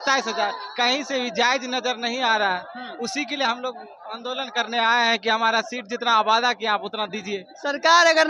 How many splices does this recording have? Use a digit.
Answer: 0